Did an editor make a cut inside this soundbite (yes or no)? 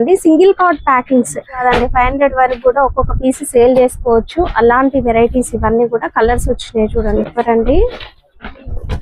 yes